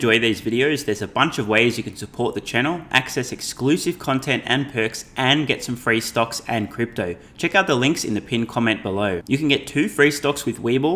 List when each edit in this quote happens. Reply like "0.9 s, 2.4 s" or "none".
none